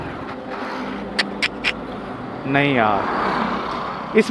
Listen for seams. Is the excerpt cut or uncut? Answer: uncut